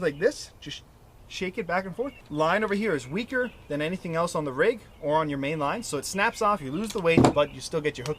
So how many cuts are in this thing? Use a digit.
1